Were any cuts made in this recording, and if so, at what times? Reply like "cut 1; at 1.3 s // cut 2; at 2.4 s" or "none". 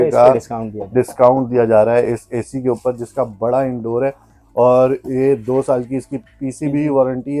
none

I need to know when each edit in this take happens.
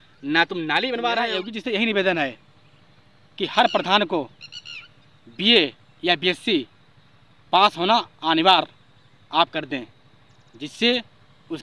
cut 1; at 1.5 s

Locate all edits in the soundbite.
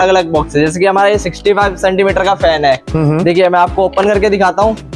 none

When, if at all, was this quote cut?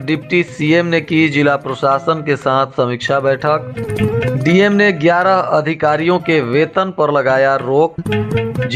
none

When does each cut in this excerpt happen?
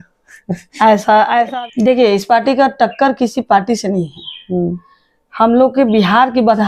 cut 1; at 1.5 s

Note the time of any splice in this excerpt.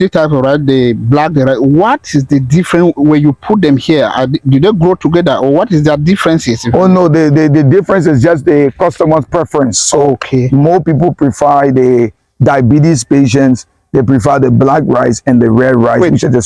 none

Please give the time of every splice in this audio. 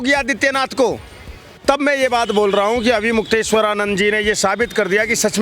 cut 1; at 1.6 s

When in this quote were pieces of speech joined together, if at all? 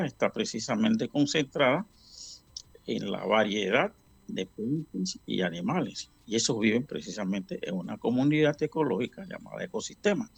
none

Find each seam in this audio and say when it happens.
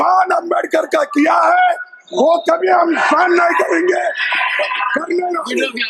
none

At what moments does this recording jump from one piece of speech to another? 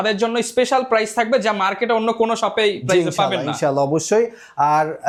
none

